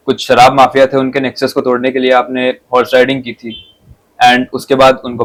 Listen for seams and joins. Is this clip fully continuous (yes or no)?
yes